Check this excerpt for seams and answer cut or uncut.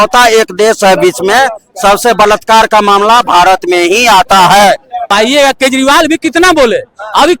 cut